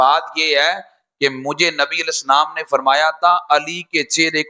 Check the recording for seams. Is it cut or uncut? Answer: uncut